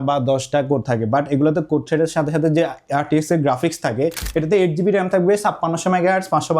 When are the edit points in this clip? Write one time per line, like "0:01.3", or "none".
0:04.2